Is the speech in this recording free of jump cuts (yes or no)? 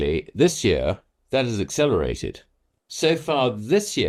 yes